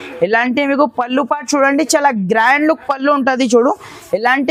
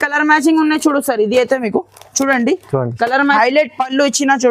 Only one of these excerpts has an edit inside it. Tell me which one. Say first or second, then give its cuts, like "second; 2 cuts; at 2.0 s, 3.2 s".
second; 1 cut; at 3.3 s